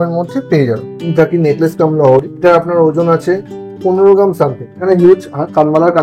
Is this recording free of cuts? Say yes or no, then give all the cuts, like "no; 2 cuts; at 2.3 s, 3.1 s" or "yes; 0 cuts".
no; 3 cuts; at 0.9 s, 2.3 s, 4.8 s